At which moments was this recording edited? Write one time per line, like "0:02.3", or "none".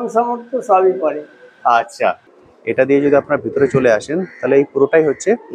0:02.2